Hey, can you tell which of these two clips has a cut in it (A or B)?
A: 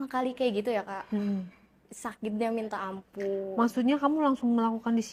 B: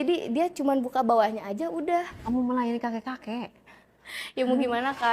B